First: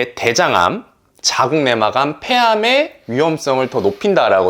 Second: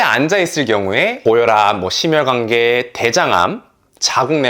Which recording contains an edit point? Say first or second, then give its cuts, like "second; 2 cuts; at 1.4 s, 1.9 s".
second; 1 cut; at 1.2 s